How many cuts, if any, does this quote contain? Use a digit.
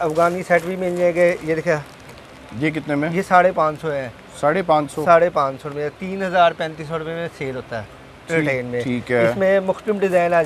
0